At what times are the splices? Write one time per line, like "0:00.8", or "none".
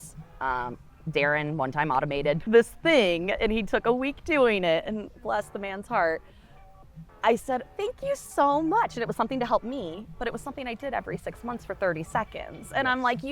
0:02.4